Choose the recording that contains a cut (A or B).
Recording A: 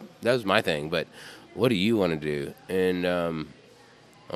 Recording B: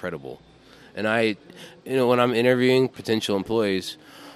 B